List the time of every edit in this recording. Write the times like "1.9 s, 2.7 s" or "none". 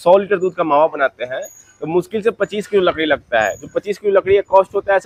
none